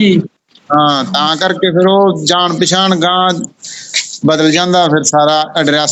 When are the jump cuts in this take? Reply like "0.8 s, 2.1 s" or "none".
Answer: none

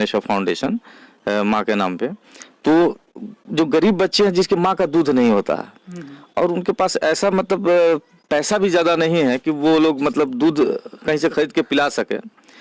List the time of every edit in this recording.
none

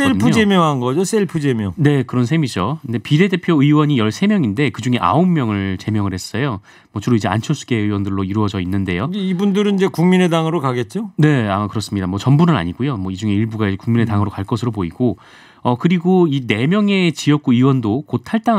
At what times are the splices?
none

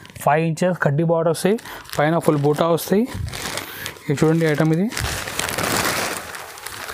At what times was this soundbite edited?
none

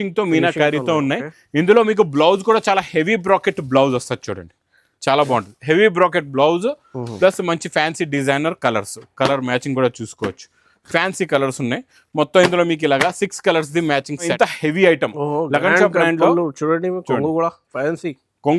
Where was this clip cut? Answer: 14.3 s

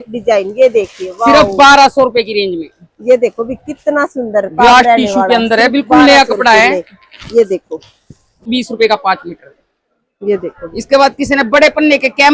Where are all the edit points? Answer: 8.5 s

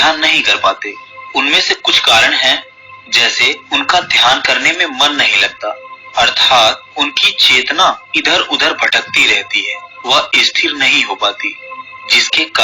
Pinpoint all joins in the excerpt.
none

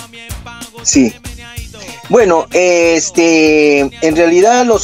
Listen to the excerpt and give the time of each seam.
none

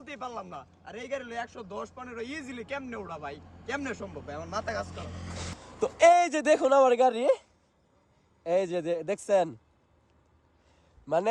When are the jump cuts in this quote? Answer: 5.7 s

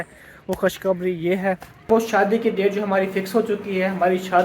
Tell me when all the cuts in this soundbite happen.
1.9 s

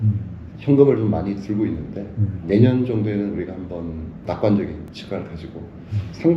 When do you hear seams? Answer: 2.4 s, 4.1 s, 4.9 s

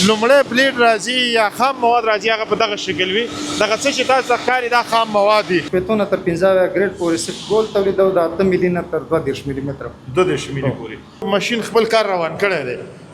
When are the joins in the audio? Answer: 5.7 s, 11.2 s

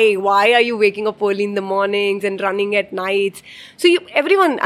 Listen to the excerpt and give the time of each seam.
none

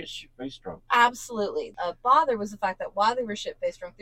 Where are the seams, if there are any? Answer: 1.7 s

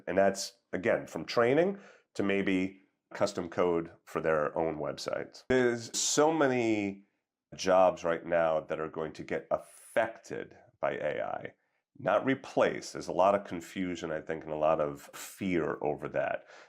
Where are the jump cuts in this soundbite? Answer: 5.4 s

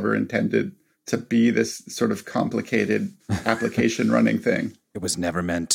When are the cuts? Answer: 3.2 s

